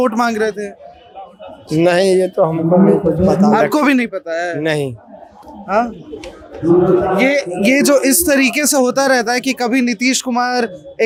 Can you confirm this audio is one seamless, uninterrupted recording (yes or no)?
yes